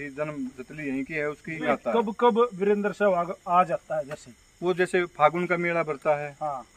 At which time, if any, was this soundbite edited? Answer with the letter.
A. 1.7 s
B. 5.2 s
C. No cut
A